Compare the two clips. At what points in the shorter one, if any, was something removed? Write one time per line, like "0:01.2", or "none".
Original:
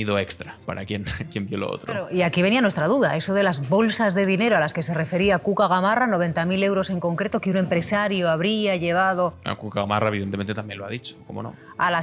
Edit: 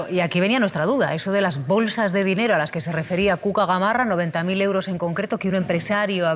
none